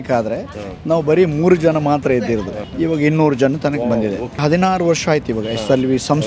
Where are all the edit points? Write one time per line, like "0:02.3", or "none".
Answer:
0:02.6
0:04.4